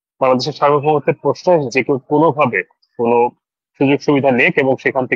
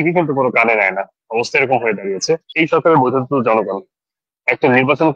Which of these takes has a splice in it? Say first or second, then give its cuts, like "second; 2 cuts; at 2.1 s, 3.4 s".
second; 1 cut; at 2.5 s